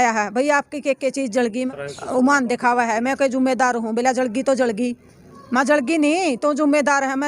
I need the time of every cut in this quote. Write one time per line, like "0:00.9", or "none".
0:01.7

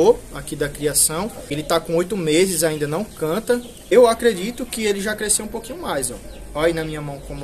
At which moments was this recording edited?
0:01.5
0:03.7

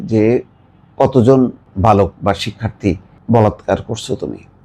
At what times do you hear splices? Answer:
0:01.6
0:03.1

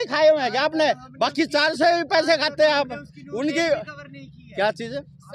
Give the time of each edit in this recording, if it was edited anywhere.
none

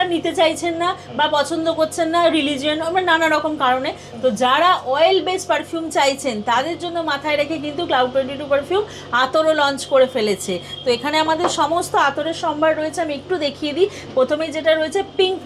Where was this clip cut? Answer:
none

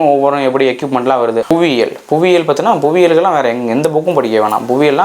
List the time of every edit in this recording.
0:01.4

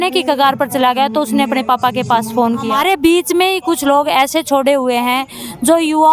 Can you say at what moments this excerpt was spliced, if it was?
0:02.7

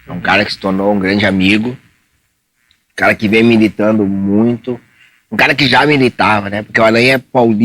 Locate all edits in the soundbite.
none

